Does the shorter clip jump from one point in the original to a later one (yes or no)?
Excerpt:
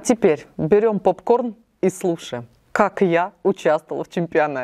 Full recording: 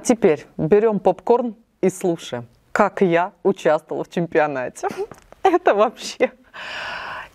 no